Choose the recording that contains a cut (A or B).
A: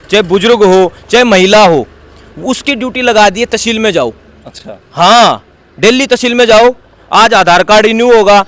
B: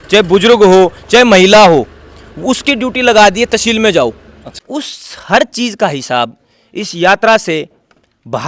B